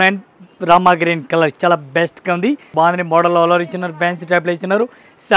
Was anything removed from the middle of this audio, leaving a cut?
yes; 1 cut; at 2.6 s

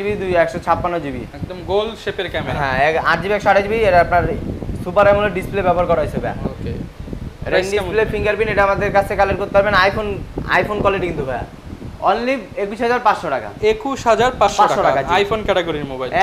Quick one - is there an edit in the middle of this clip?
no; 0 cuts

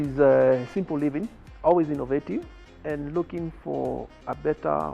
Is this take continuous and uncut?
no; 2 cuts; at 1.4 s, 2.6 s

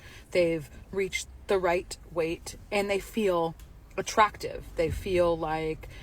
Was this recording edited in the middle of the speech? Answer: yes; 1 cut; at 2.5 s

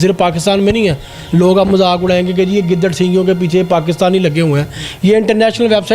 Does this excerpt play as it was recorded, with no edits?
yes; 0 cuts

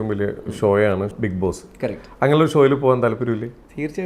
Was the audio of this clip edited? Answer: yes; 1 cut; at 1.1 s

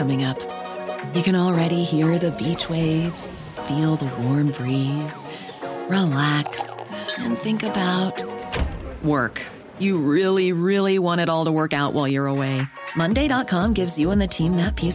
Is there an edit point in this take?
no; 0 cuts

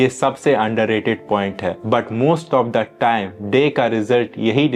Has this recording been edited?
no; 0 cuts

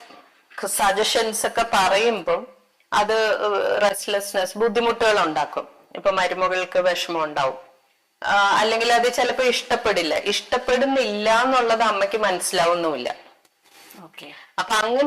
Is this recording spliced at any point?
no; 0 cuts

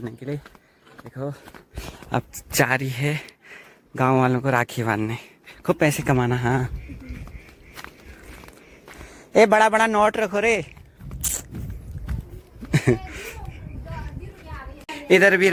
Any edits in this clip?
no; 0 cuts

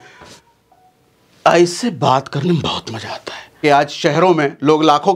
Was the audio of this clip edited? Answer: yes; 1 cut; at 3.6 s

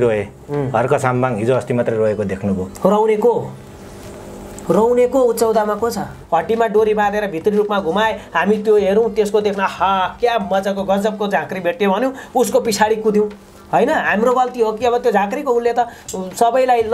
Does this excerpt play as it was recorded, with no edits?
no; 1 cut; at 6.2 s

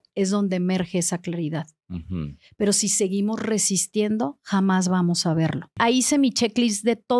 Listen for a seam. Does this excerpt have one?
yes; 1 cut; at 5.7 s

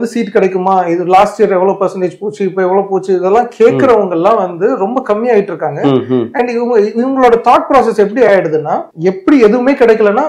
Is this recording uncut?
no; 1 cut; at 8.9 s

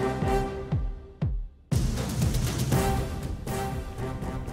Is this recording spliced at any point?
yes; 2 cuts; at 2.3 s, 3.5 s

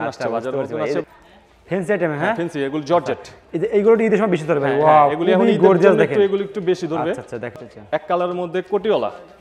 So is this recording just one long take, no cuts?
no; 2 cuts; at 1.0 s, 7.6 s

